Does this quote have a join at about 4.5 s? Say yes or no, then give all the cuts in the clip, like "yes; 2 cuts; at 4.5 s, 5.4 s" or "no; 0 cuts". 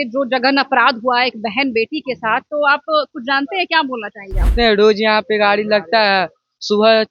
yes; 1 cut; at 4.5 s